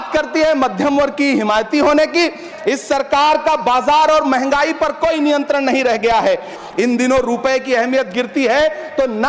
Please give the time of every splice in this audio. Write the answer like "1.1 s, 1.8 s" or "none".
2.5 s, 6.6 s